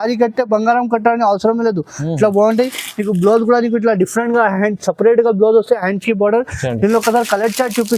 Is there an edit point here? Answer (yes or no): no